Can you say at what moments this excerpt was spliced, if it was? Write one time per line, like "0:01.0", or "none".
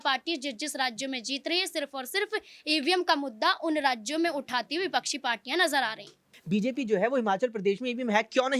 0:06.3